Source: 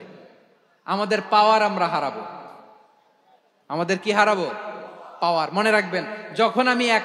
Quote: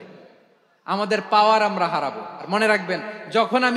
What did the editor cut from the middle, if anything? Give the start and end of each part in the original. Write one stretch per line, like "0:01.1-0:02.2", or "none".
0:02.5-0:05.5